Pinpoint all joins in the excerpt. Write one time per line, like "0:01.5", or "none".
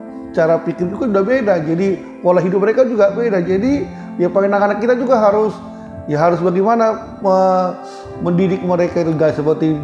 none